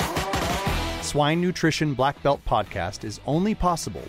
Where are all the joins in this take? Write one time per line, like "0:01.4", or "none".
0:00.9